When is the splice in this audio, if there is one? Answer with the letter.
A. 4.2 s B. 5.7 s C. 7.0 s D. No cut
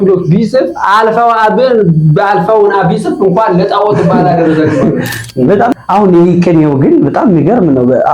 B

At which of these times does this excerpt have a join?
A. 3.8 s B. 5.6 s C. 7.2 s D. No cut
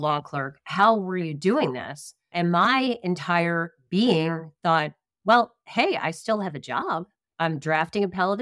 C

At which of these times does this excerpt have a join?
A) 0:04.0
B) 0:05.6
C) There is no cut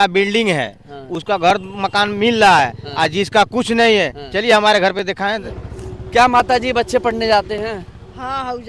B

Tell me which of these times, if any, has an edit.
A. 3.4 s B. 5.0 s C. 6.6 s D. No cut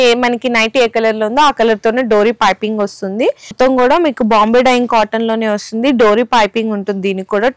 A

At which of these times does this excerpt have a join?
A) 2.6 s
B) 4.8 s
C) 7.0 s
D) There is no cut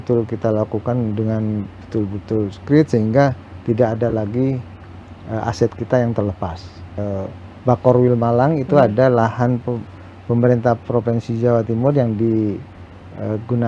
C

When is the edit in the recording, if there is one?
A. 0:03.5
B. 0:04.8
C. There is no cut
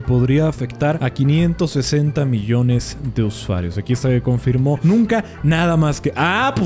B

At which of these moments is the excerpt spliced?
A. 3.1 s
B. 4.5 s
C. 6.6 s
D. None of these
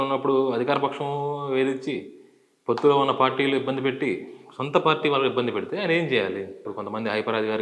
C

